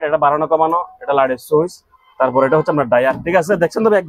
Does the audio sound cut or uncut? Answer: uncut